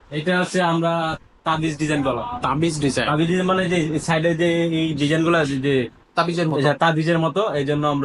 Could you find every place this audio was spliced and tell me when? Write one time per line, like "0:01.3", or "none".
none